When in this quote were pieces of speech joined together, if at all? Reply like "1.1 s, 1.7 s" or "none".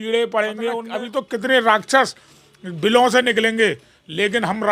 0.9 s